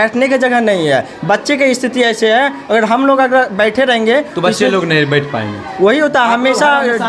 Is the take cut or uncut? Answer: uncut